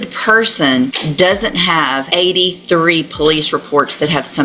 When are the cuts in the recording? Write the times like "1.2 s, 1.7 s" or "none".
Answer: 1.0 s, 2.0 s